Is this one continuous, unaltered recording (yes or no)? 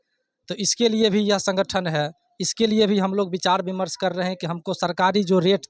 yes